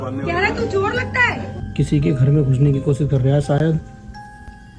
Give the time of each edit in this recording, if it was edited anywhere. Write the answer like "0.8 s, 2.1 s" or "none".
1.7 s